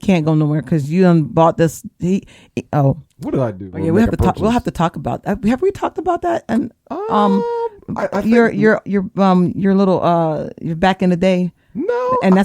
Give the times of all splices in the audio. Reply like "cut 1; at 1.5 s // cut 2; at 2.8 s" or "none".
cut 1; at 3.7 s

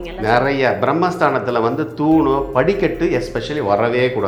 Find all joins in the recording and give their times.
none

